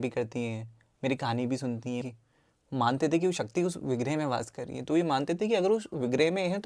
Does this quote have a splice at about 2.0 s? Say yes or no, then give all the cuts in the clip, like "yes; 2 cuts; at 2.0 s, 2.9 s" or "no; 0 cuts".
yes; 1 cut; at 2.0 s